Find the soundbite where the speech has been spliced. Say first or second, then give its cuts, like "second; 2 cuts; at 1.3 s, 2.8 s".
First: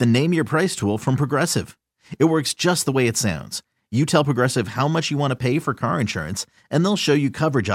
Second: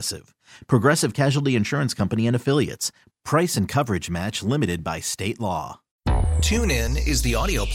second; 1 cut; at 5.8 s